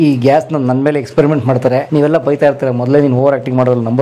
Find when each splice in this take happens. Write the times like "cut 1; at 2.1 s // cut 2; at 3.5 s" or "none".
cut 1; at 1.9 s